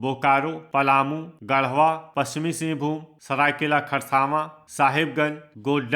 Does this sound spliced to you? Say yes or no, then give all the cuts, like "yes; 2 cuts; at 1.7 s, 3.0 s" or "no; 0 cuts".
yes; 4 cuts; at 0.8 s, 2.1 s, 3.1 s, 4.6 s